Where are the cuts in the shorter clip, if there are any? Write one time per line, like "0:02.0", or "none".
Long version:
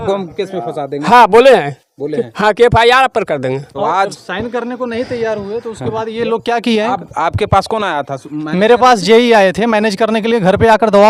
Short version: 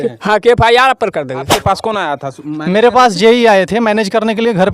0:01.5